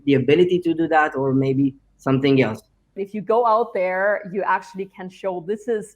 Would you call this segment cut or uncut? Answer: cut